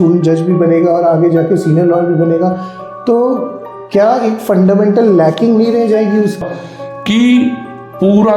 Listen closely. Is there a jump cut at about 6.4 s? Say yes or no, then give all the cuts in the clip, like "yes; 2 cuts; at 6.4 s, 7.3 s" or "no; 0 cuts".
yes; 1 cut; at 6.4 s